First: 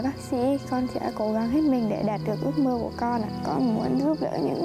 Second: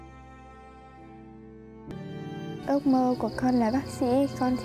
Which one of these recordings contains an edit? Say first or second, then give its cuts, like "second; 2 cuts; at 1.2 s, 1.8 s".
second; 1 cut; at 1.9 s